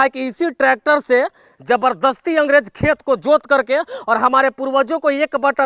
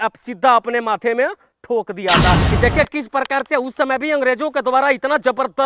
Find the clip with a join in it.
second; 1 cut; at 2.5 s

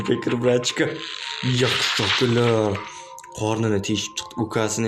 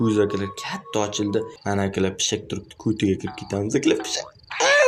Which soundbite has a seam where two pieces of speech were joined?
second; 1 cut; at 1.5 s

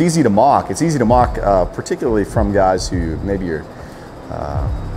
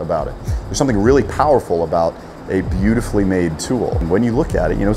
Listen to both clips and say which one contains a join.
second; 1 cut; at 4.0 s

